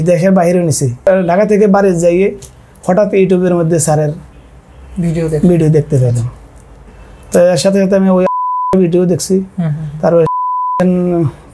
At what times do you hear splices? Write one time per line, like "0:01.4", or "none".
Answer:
0:01.1